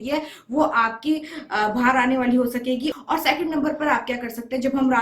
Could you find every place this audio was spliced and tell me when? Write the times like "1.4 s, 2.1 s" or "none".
3.0 s